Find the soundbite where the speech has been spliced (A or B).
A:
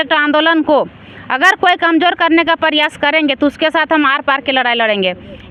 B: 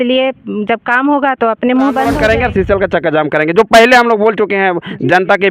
B